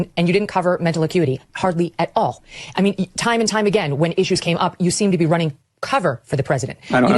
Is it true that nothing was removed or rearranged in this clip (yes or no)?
no